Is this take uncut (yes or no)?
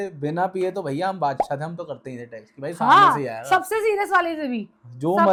yes